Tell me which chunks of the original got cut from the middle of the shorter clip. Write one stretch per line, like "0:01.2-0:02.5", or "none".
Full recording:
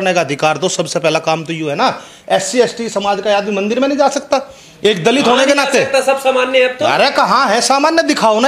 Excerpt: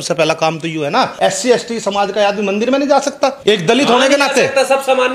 0:02.0-0:02.2
0:04.5-0:04.7